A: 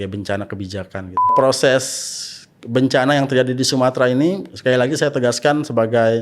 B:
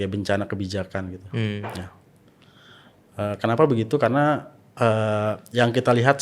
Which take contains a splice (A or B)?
A